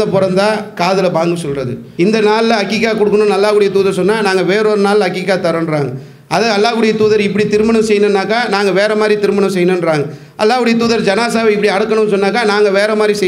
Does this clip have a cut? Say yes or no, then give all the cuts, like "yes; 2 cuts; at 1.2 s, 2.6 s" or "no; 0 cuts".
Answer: yes; 1 cut; at 1.8 s